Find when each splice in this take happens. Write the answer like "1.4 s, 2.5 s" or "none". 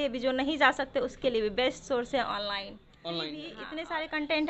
3.5 s